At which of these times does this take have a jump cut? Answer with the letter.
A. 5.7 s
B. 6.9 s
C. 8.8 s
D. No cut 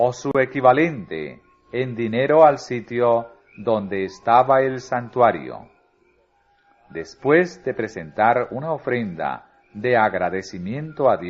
C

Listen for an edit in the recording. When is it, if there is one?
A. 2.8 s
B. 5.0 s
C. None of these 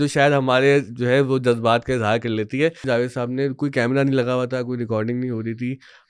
A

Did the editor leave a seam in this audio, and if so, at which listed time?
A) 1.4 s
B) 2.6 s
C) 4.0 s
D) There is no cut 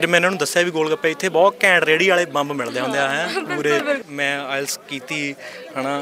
C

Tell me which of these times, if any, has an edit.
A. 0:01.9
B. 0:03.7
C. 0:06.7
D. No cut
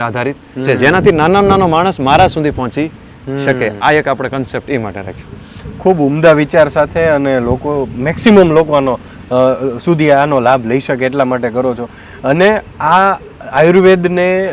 D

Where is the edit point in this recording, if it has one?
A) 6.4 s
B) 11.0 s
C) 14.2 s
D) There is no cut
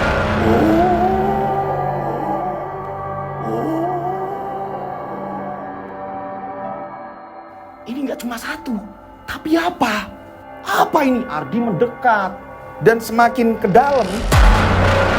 C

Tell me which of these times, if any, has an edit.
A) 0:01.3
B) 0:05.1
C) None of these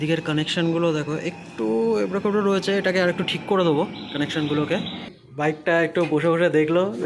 B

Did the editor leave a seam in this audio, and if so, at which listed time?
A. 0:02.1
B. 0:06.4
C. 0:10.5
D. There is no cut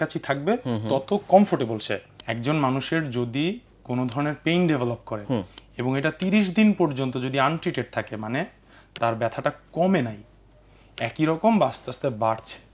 A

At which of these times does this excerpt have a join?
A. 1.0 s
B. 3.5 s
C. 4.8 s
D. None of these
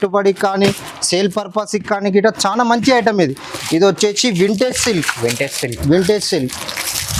B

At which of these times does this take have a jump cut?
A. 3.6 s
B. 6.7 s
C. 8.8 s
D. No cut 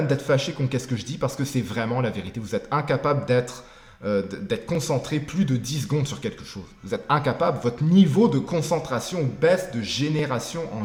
D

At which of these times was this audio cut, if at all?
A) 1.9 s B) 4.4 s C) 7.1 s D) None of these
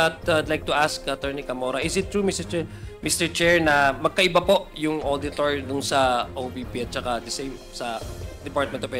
D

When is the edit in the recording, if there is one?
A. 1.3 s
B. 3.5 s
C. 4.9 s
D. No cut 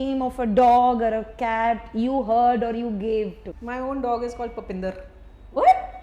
B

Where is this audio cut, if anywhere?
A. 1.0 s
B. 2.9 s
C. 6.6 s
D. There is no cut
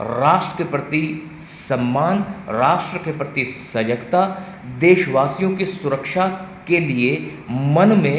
D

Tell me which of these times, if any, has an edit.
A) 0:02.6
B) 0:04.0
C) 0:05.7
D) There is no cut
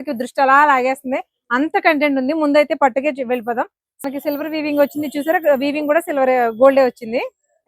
B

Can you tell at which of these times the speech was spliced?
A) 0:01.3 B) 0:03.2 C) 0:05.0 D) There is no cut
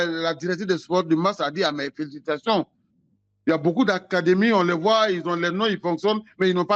D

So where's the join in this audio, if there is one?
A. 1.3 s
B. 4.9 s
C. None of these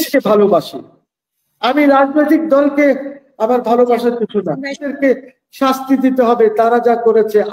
B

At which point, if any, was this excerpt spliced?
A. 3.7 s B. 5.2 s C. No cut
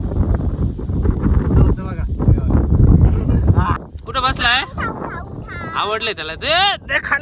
A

